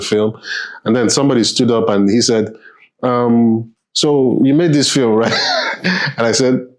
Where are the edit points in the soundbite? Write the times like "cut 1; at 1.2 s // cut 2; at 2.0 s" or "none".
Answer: none